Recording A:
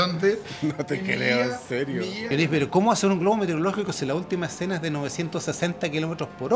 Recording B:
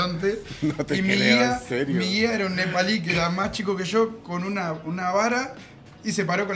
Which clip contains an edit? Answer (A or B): A